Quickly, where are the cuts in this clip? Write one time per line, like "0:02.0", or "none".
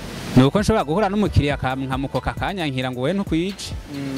none